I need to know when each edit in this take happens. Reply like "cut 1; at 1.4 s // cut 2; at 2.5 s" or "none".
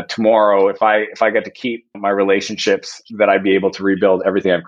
cut 1; at 1.9 s

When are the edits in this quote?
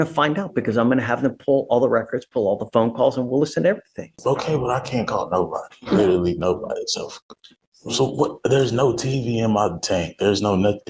cut 1; at 4.1 s

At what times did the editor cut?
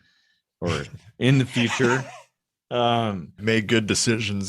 cut 1; at 3.4 s

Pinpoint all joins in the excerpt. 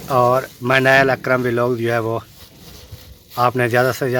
none

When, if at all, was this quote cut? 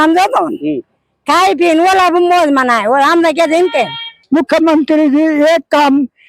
cut 1; at 4.1 s

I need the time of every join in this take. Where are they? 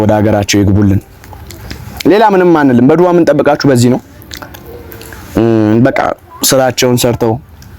none

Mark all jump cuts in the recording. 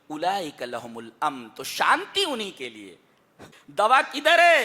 cut 1; at 3.6 s

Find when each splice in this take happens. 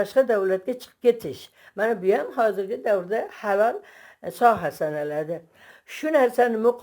cut 1; at 5.7 s

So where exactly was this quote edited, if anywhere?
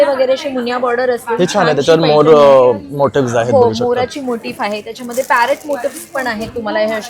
none

